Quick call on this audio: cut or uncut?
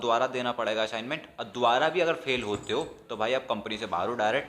uncut